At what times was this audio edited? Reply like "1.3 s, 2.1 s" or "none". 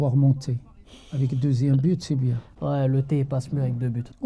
none

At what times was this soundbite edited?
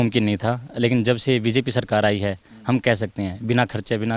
none

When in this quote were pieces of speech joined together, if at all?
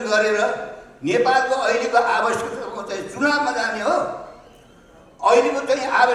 none

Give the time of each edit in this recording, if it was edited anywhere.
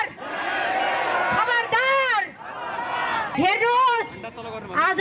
3.3 s

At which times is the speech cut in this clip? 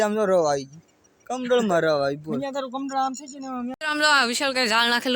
3.8 s

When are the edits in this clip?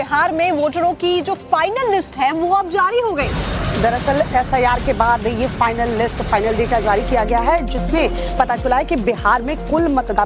0.9 s

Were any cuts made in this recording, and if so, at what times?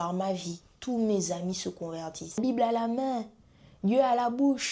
2.4 s

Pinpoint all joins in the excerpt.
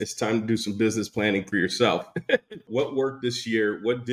1.5 s, 2.6 s

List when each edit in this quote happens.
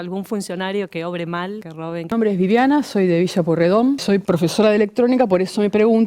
2.1 s, 4.0 s

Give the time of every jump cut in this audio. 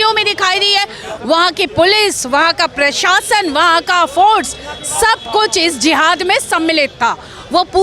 none

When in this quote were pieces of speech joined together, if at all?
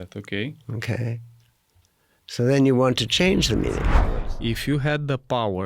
3.9 s

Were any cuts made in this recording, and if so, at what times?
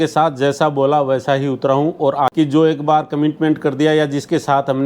2.3 s

